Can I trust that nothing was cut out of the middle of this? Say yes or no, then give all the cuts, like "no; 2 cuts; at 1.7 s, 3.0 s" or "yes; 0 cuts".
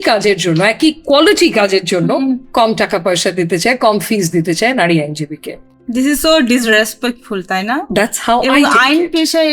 yes; 0 cuts